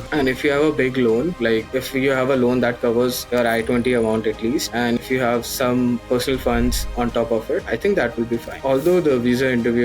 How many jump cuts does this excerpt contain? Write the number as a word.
one